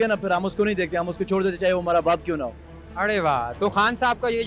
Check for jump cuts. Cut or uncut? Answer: uncut